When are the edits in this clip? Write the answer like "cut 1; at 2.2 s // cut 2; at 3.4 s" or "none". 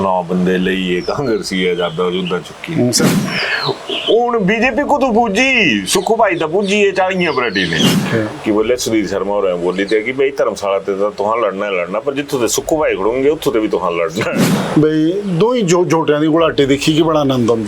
cut 1; at 3.1 s // cut 2; at 8.0 s // cut 3; at 14.5 s

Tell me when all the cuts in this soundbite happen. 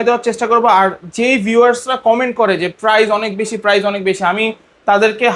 none

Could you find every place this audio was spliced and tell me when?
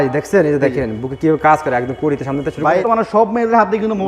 cut 1; at 2.8 s

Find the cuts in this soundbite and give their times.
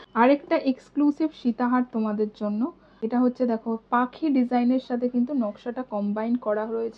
cut 1; at 2.9 s

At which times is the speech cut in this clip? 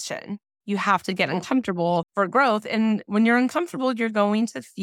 cut 1; at 2.1 s

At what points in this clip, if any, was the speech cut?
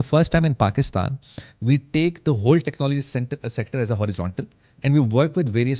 none

